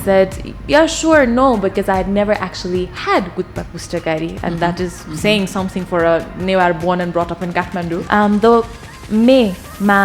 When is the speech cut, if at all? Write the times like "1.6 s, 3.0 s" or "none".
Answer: 8.0 s